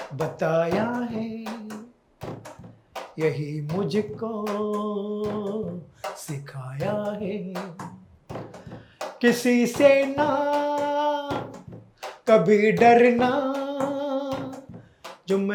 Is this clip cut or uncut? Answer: uncut